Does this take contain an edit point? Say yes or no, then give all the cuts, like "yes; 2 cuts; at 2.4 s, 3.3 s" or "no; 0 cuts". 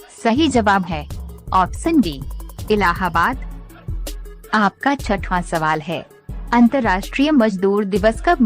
yes; 1 cut; at 2.2 s